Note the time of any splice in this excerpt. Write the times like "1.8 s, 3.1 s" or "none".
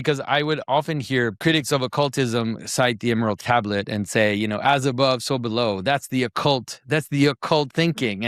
1.4 s, 3.4 s